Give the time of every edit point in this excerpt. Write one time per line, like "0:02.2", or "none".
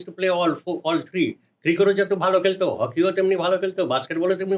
none